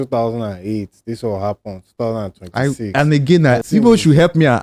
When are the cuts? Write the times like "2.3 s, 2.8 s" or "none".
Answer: 3.6 s